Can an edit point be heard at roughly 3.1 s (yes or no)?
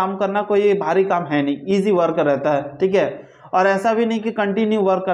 no